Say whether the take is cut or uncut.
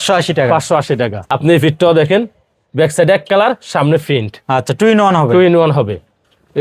cut